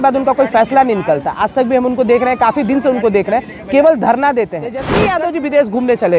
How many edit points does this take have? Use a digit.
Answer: 1